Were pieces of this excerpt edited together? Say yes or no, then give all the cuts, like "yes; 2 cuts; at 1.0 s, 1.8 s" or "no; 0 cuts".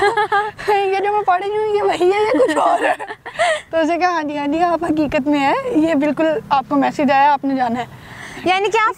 no; 0 cuts